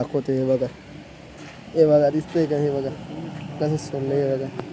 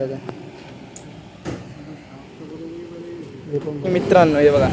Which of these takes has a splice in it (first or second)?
second